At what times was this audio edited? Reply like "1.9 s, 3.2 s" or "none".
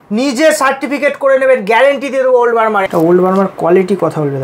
2.9 s